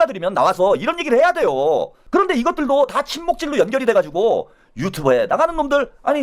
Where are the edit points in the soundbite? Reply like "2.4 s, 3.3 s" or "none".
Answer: 2.0 s